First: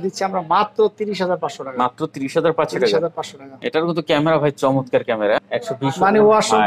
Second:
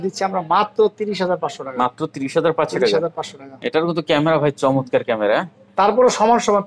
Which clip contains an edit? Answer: first; 1 cut; at 5.5 s

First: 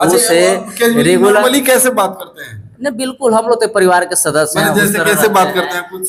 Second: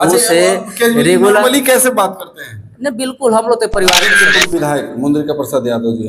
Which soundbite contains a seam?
second; 1 cut; at 4.2 s

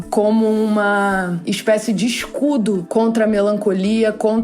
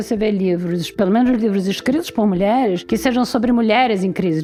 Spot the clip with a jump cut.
first; 2 cuts; at 1.4 s, 2.9 s

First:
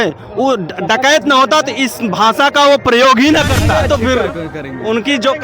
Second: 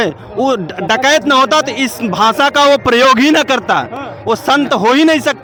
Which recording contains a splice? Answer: first; 1 cut; at 3.8 s

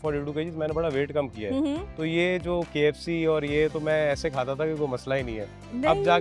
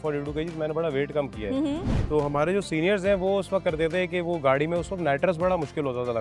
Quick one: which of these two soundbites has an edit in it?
second; 1 cut; at 2.0 s

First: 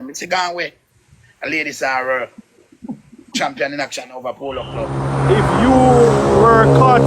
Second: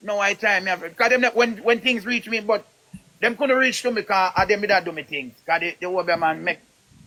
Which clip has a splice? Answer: first; 1 cut; at 4.9 s

